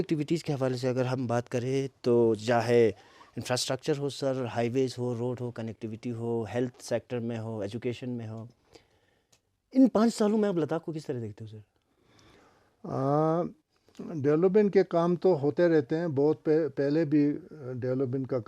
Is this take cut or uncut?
uncut